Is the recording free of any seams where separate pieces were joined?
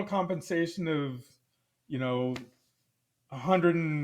yes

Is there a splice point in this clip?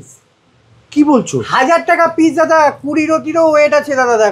no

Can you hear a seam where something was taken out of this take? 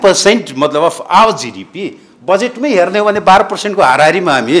no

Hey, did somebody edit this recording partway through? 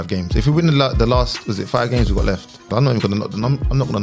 yes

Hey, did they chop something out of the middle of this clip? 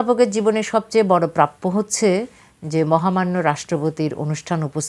no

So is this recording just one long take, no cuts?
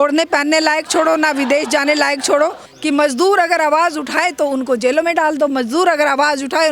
no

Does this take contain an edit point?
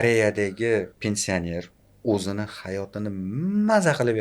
yes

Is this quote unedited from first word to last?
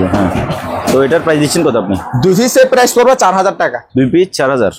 yes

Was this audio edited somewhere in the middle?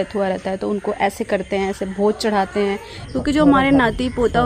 yes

